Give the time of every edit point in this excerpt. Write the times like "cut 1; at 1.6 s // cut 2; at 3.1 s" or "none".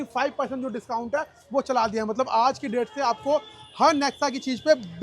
none